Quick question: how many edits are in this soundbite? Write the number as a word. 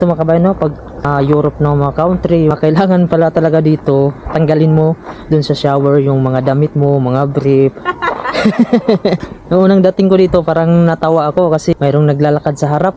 four